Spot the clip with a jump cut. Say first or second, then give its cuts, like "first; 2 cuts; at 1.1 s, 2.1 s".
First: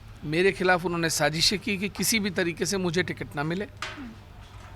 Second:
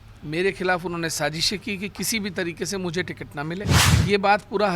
second; 1 cut; at 3.8 s